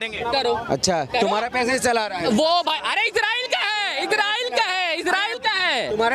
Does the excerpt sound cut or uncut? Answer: uncut